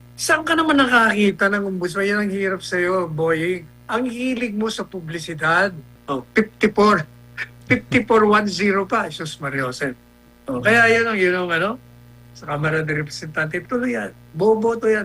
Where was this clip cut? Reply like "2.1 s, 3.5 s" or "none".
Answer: 5.9 s